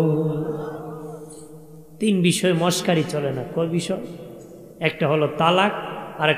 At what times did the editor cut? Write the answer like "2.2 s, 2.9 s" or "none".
none